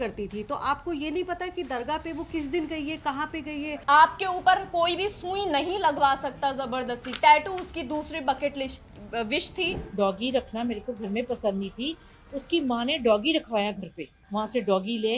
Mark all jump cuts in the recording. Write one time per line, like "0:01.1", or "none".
0:03.7
0:09.8
0:14.2

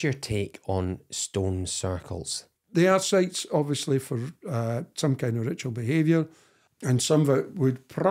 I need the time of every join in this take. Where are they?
0:02.5
0:06.8

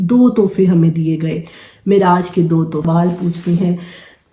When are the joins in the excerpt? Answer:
0:02.9

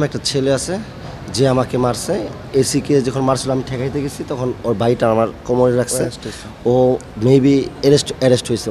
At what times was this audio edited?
none

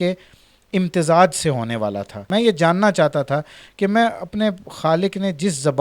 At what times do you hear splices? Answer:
0:02.2

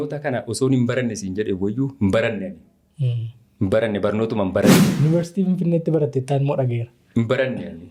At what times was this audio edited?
none

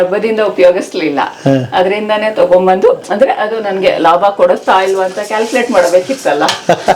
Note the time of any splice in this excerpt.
none

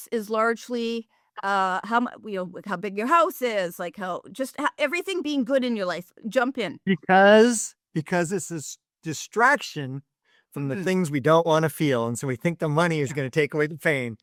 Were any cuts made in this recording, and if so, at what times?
none

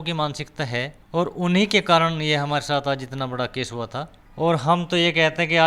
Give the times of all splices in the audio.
0:01.0
0:04.2

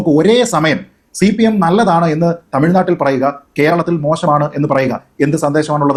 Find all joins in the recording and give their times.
none

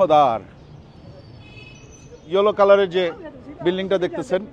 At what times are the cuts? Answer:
0:02.1

